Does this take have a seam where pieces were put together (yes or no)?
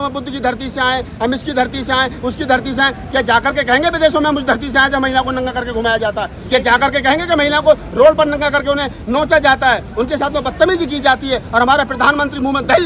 no